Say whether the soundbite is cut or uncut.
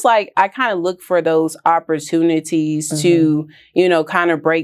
uncut